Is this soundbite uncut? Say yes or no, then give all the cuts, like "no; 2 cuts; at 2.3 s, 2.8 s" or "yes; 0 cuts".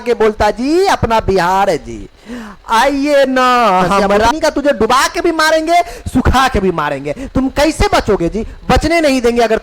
no; 1 cut; at 4.3 s